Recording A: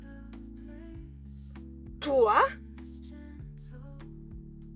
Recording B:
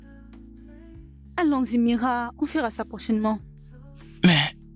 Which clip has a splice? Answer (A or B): B